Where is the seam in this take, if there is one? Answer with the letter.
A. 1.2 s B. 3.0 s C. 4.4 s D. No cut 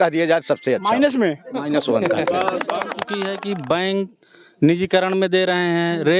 B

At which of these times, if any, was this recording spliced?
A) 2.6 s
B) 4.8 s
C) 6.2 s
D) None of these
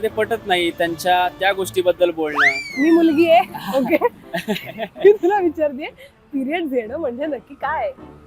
A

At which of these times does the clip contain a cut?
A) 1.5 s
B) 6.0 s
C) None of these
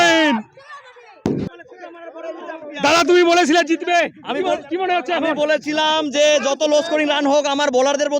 A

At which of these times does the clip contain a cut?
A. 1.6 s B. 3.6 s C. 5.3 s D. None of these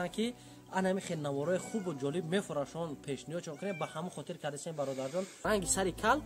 C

